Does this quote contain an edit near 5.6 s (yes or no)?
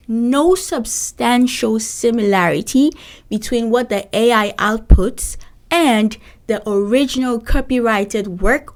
no